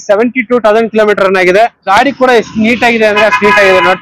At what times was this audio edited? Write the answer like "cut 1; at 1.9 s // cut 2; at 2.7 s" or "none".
cut 1; at 1.9 s